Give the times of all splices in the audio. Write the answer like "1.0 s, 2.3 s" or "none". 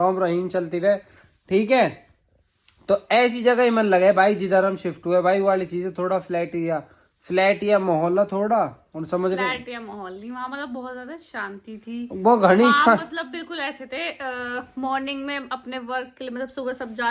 none